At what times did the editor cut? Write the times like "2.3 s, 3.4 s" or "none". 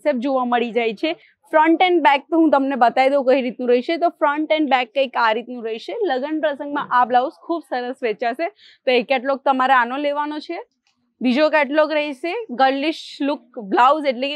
none